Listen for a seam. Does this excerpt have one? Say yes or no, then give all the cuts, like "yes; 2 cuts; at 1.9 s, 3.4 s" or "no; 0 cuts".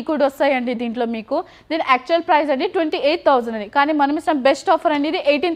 no; 0 cuts